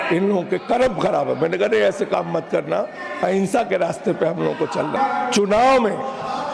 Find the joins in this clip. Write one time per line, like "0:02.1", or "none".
none